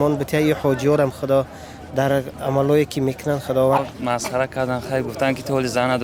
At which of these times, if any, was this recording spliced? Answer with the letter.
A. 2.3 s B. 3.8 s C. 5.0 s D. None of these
B